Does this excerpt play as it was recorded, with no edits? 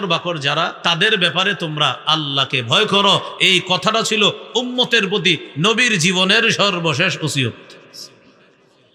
yes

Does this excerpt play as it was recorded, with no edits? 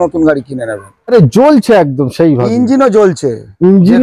no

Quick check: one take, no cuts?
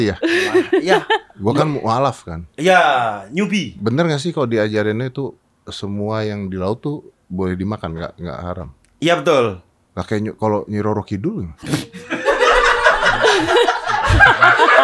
yes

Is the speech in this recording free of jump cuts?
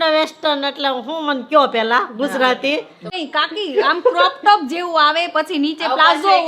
no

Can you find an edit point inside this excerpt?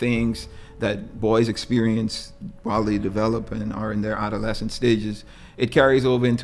no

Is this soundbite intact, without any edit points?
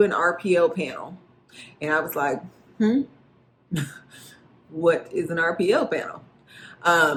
yes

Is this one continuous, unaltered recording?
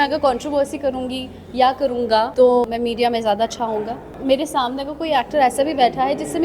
no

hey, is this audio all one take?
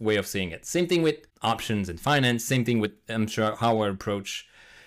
no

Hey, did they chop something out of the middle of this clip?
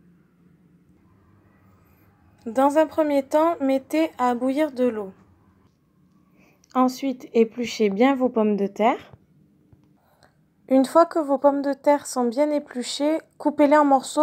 no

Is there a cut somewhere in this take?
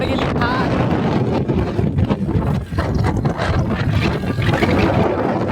yes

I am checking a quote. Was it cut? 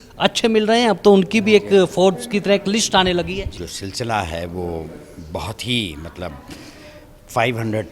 yes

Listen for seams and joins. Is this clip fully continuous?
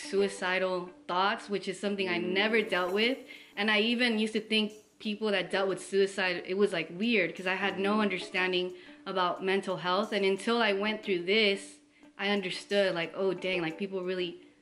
yes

